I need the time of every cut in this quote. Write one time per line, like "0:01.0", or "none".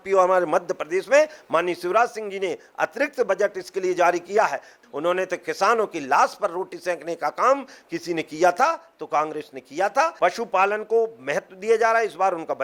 0:04.8
0:10.1

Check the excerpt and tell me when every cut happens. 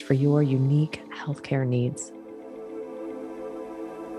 0:02.0

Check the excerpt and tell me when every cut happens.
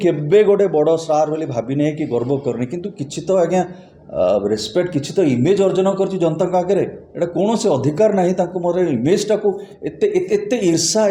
none

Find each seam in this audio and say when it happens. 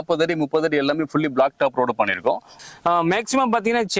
0:02.5

